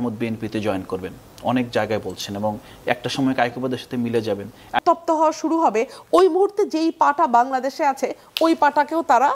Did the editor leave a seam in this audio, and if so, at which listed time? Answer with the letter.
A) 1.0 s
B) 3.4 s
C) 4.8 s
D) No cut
C